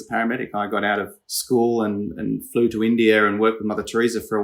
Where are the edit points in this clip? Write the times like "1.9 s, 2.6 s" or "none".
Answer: none